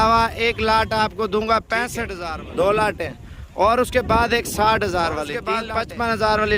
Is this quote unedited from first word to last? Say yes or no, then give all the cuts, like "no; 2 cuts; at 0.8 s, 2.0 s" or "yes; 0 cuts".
no; 2 cuts; at 2.1 s, 5.5 s